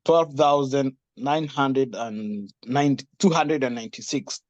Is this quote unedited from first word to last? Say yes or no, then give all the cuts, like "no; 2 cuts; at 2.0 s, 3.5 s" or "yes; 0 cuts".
yes; 0 cuts